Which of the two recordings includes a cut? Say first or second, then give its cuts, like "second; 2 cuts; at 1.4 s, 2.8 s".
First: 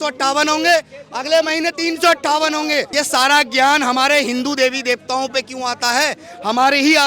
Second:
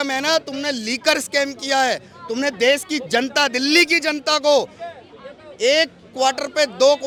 first; 1 cut; at 2.9 s